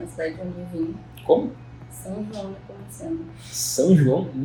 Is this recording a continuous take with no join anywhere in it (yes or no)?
yes